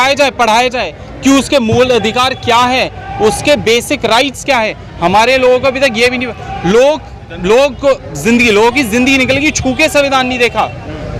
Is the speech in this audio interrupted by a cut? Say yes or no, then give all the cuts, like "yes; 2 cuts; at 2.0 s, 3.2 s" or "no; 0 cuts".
no; 0 cuts